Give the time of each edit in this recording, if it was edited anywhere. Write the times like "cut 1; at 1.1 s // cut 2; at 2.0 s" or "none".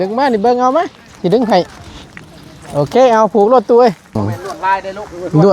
cut 1; at 4.2 s